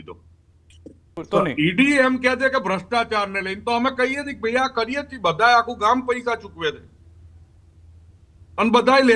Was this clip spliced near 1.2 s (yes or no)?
yes